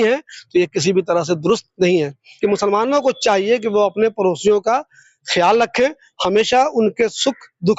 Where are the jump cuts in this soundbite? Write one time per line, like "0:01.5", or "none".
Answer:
0:02.2